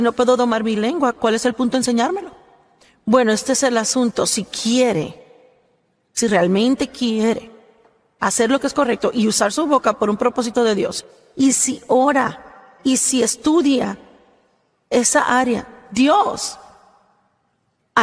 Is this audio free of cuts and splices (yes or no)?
yes